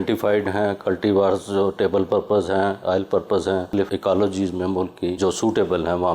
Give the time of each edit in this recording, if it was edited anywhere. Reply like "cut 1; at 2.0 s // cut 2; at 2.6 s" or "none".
cut 1; at 3.8 s // cut 2; at 5.2 s